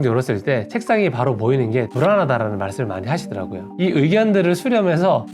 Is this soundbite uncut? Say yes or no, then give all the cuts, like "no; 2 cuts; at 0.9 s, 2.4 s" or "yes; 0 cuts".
yes; 0 cuts